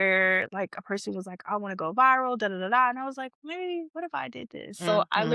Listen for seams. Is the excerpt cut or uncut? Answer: uncut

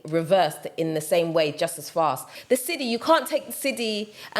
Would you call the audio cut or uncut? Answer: cut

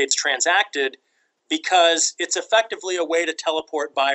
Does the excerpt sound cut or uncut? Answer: uncut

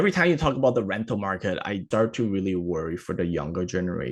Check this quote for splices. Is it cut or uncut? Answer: cut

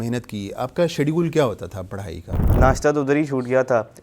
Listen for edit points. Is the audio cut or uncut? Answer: cut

